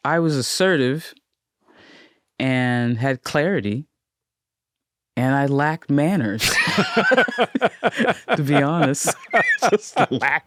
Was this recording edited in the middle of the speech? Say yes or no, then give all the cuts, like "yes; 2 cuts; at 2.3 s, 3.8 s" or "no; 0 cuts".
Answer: no; 0 cuts